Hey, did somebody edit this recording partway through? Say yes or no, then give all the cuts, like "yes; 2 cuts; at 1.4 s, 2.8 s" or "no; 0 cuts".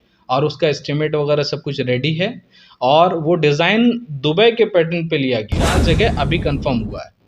yes; 1 cut; at 5.8 s